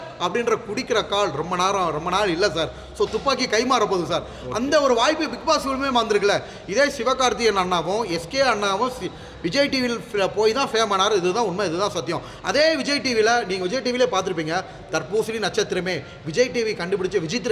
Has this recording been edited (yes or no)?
no